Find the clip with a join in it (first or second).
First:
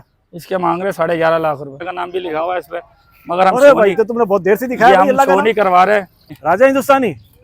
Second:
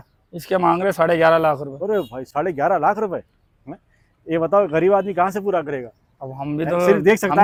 first